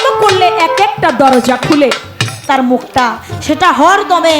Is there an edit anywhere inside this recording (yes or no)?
yes